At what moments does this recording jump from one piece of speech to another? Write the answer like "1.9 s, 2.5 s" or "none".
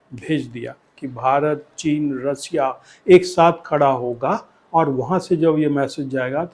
1.0 s